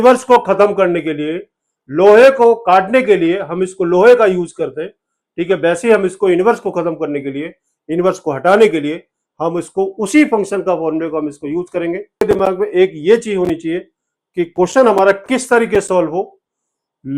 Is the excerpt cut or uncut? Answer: cut